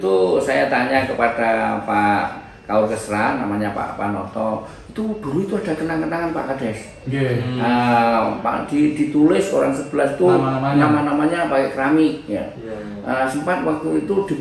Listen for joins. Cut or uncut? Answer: uncut